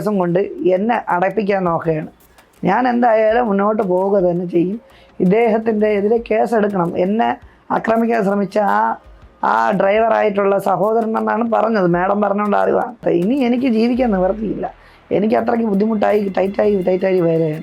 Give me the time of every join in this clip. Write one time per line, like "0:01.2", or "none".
0:13.0